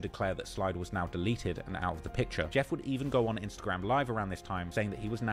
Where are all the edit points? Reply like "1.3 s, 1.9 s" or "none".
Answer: none